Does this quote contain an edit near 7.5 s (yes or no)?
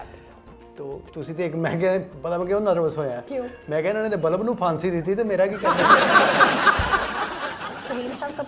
yes